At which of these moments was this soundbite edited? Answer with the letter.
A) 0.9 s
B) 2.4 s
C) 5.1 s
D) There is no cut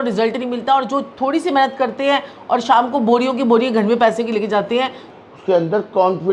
C